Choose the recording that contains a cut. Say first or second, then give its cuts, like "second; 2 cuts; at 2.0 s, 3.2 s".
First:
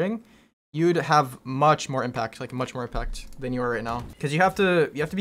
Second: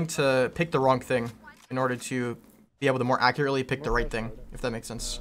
first; 1 cut; at 4.1 s